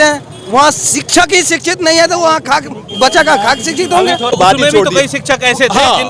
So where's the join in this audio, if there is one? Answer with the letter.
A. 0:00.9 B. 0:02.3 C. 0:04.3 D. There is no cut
C